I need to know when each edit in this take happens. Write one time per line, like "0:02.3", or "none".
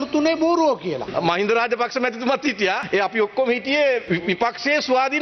0:01.0
0:02.8
0:04.0